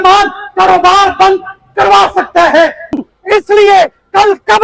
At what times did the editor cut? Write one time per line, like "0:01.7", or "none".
0:03.0